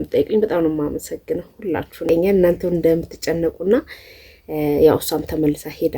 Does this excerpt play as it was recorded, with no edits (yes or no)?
no